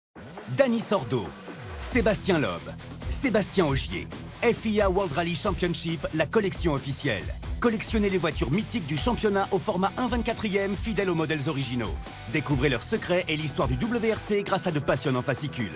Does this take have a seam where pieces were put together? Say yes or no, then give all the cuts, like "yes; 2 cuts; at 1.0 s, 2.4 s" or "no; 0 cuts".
no; 0 cuts